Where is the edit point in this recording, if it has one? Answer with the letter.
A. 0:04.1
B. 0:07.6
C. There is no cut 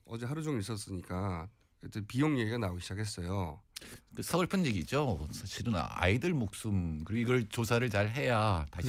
C